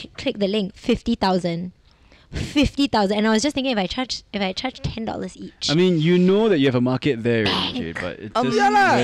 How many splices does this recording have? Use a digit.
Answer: 0